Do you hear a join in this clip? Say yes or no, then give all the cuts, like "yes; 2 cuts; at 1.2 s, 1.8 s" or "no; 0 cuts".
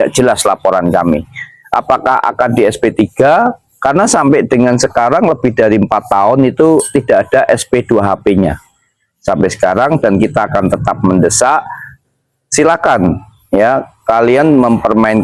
no; 0 cuts